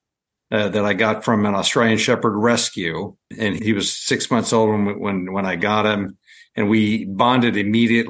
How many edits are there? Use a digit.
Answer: 1